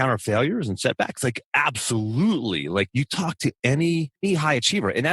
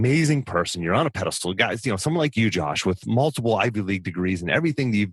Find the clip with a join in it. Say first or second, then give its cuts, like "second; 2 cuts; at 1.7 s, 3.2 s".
first; 3 cuts; at 1.4 s, 2.9 s, 4.2 s